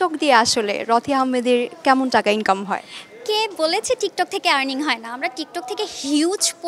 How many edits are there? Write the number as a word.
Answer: zero